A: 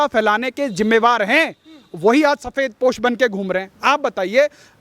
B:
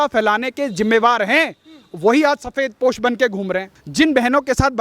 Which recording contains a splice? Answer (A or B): B